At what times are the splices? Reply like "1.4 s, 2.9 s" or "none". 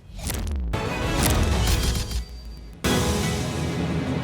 2.8 s